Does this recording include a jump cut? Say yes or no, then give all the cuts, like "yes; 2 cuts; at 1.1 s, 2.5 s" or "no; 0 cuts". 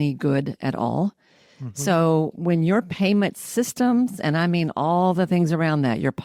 no; 0 cuts